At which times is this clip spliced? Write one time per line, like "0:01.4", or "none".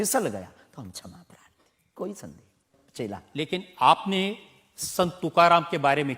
0:02.7